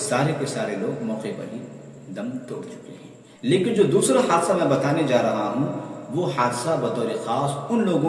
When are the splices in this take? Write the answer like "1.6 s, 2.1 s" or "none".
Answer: 3.2 s